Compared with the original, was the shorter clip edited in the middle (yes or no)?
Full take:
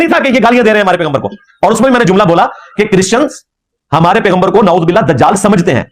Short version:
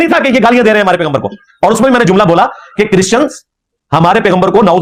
no